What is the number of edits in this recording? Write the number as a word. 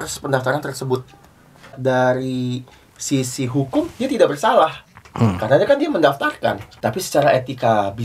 two